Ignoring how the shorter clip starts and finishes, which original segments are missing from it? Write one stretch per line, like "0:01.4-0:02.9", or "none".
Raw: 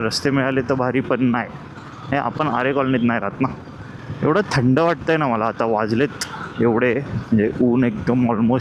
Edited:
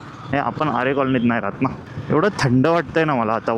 0:03.7-0:04.0